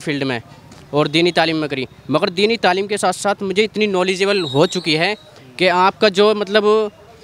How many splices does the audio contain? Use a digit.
0